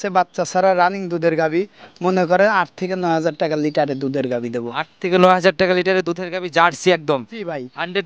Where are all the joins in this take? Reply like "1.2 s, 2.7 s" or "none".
none